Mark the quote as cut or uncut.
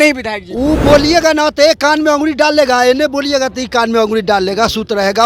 uncut